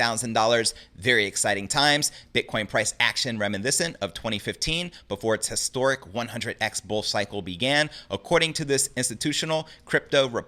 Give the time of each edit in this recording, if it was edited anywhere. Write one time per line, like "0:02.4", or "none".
none